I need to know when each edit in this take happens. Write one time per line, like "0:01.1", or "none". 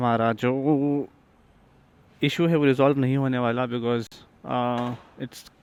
none